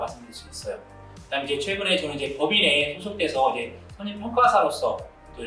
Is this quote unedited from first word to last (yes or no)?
yes